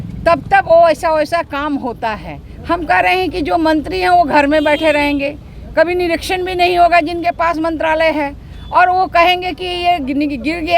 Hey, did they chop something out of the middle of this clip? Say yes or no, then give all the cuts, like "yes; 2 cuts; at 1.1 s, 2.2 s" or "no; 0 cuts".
no; 0 cuts